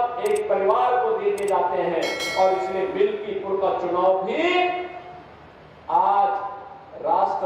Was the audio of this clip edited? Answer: no; 0 cuts

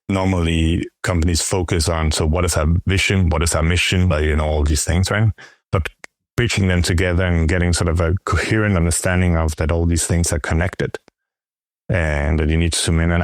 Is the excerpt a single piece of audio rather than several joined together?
no; 1 cut; at 4.1 s

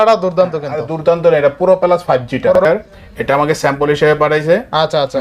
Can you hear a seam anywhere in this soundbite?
yes; 1 cut; at 2.6 s

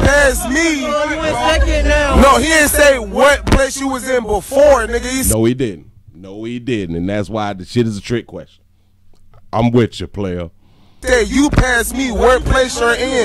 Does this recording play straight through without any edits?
yes; 0 cuts

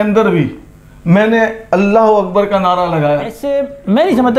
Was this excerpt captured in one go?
no; 1 cut; at 3.4 s

